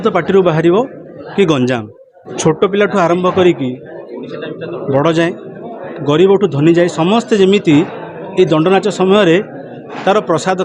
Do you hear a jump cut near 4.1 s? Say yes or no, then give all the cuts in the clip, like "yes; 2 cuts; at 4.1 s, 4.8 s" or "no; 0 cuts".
no; 1 cut; at 2.3 s